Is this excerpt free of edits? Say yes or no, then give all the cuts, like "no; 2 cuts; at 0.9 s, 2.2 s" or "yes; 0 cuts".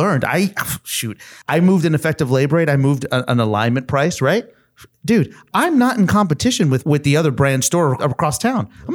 no; 3 cuts; at 1.3 s, 6.8 s, 8.0 s